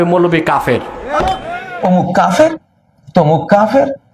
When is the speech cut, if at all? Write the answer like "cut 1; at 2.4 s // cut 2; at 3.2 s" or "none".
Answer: cut 1; at 1.6 s